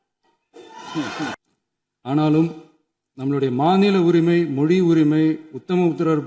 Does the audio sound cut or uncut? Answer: cut